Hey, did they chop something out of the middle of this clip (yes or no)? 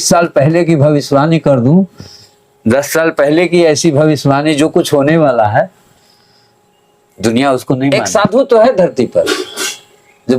yes